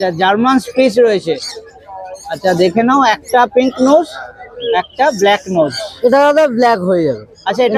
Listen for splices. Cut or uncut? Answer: uncut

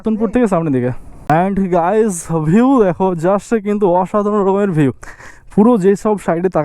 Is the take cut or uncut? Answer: cut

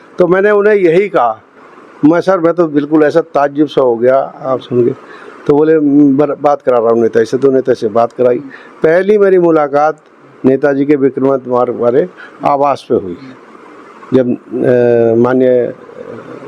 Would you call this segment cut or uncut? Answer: uncut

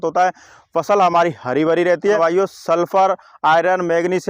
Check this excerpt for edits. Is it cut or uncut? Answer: cut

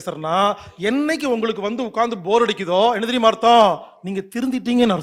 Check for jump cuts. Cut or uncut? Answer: uncut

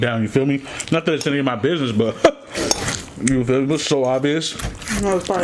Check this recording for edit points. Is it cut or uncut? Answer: uncut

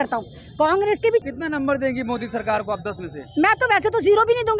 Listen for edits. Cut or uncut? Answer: cut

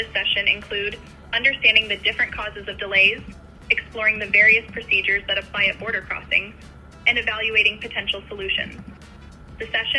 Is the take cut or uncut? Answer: uncut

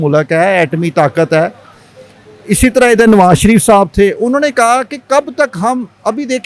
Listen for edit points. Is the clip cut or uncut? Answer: uncut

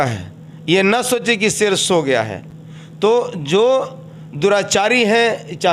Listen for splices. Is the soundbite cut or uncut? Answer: uncut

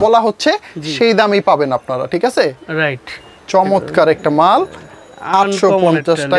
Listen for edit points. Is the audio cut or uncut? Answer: uncut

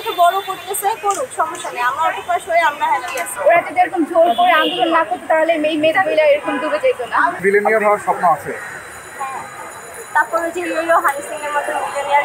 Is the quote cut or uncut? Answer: cut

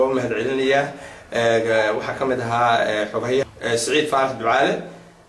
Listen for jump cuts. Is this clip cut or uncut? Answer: cut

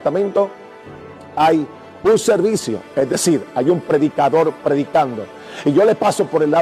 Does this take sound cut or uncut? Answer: uncut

